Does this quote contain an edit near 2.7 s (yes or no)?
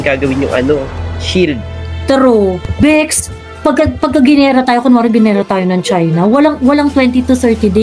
yes